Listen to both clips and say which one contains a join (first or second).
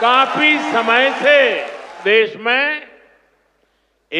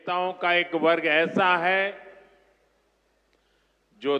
first